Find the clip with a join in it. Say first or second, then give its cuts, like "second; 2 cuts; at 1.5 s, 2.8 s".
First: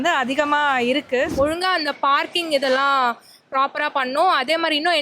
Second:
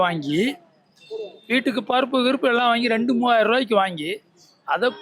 first; 1 cut; at 1.3 s